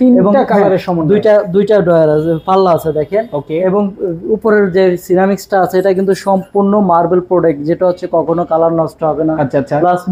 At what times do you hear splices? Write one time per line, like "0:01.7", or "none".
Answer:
none